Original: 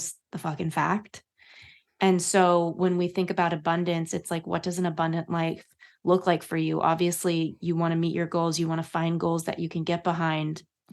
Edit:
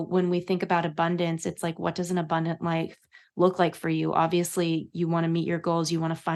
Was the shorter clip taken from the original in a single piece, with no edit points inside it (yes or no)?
yes